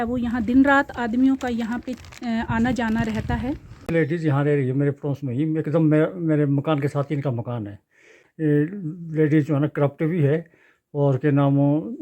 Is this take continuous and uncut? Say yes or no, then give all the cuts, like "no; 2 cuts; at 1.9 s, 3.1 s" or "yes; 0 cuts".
no; 1 cut; at 3.7 s